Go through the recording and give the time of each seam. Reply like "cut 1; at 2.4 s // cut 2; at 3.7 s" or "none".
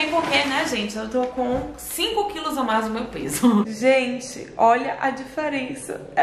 cut 1; at 3.7 s